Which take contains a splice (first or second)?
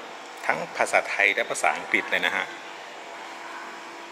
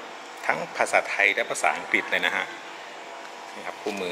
first